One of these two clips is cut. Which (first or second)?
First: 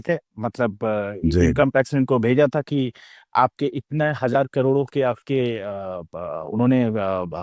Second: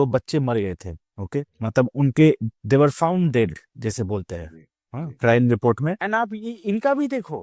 second